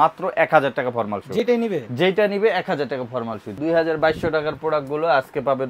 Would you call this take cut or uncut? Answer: cut